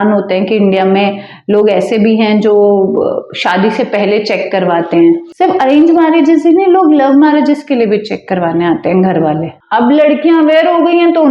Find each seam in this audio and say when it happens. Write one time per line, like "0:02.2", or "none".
0:05.3
0:09.6

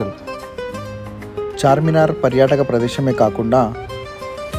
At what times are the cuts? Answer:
none

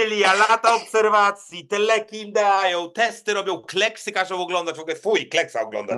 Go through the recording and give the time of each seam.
none

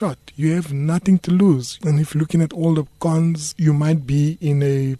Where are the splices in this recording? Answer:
0:01.7

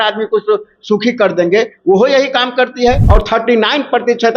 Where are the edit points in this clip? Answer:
0:03.0

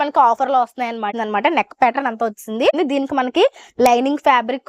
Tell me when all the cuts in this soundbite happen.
0:01.1
0:02.7

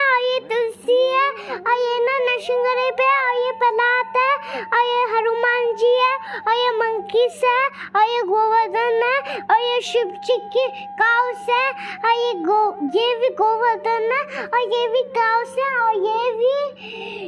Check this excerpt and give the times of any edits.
none

